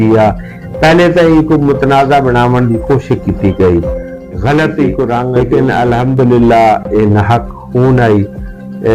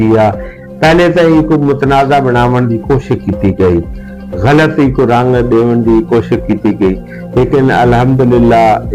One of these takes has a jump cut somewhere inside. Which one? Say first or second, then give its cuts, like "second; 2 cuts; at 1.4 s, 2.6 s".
first; 1 cut; at 5.3 s